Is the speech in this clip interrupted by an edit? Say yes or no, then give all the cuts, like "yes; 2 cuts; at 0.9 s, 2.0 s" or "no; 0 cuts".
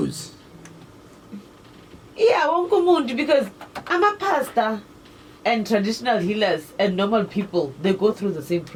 no; 0 cuts